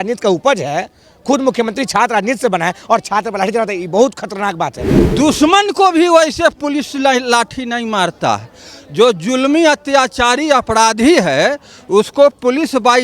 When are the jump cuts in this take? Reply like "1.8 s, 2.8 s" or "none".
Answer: 5.0 s

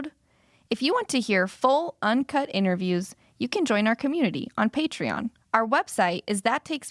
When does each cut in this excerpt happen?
5.4 s

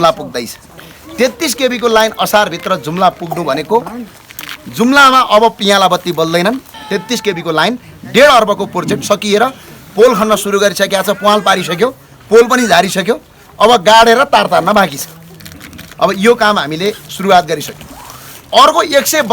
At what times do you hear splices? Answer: 6.7 s

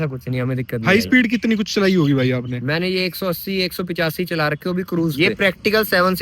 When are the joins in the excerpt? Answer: 0.8 s, 5.1 s

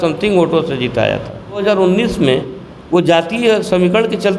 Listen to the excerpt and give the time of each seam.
1.6 s

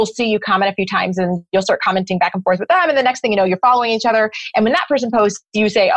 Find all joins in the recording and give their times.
none

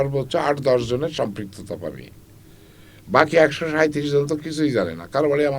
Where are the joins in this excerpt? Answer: none

